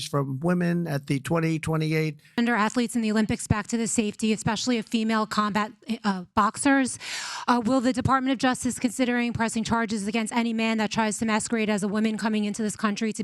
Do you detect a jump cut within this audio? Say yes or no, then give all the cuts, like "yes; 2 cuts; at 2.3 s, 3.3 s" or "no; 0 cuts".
yes; 1 cut; at 2.2 s